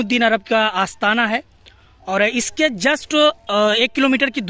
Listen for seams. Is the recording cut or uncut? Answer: uncut